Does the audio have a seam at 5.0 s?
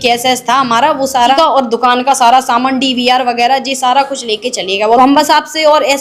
yes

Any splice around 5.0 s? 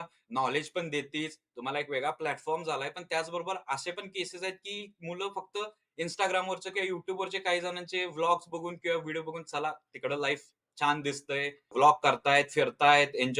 no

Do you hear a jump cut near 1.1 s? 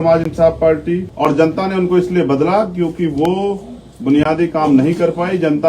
yes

